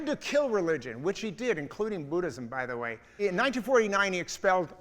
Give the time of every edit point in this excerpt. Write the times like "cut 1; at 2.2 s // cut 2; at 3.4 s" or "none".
cut 1; at 3.2 s